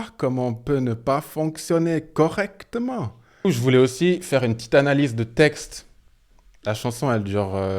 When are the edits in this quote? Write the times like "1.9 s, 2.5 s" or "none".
3.4 s